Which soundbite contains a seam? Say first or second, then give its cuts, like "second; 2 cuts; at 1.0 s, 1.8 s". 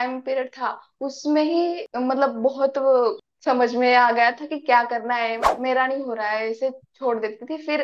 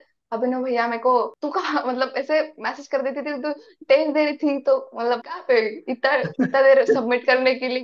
first; 3 cuts; at 1.9 s, 3.2 s, 5.5 s